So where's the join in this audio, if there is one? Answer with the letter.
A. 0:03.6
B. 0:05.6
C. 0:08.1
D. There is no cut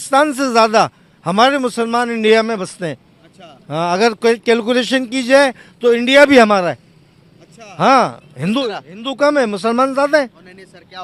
D